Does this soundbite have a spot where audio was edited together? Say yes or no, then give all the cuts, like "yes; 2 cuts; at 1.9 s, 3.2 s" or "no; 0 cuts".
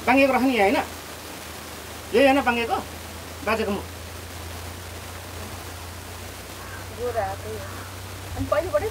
no; 0 cuts